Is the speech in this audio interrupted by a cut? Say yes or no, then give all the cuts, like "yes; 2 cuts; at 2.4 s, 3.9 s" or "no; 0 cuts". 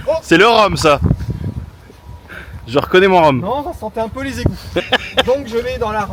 no; 0 cuts